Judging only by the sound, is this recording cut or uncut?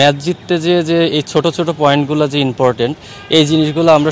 uncut